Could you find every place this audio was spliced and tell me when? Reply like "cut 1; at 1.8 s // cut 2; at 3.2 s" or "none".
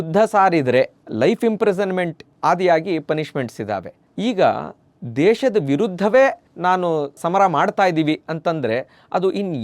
cut 1; at 1.0 s